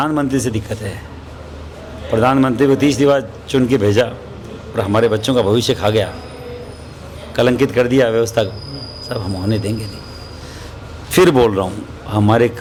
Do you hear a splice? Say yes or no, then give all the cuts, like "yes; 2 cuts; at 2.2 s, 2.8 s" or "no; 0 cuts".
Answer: no; 0 cuts